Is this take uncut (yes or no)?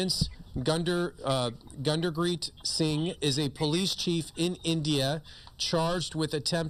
yes